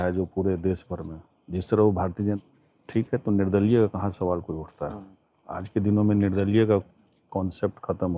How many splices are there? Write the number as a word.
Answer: one